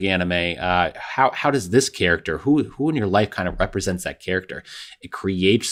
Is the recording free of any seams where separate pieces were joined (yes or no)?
yes